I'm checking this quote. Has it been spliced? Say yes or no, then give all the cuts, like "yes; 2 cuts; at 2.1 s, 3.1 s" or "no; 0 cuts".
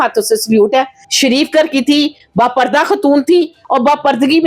yes; 2 cuts; at 1.0 s, 3.6 s